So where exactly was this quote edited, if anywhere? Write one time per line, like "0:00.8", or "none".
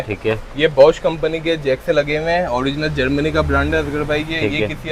none